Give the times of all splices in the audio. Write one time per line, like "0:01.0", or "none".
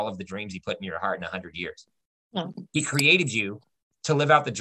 0:02.7